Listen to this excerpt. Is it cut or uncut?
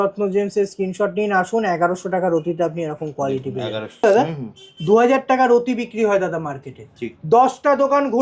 cut